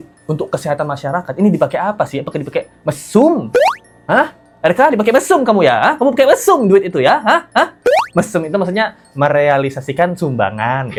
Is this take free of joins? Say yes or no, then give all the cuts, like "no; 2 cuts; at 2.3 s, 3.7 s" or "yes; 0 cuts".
yes; 0 cuts